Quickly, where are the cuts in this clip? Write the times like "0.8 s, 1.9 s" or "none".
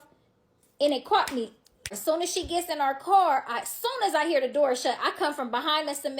1.9 s